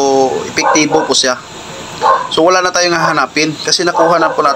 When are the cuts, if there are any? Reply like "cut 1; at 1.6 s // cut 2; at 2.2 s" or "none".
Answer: none

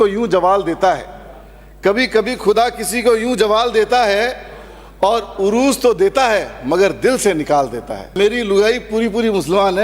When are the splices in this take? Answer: cut 1; at 8.1 s

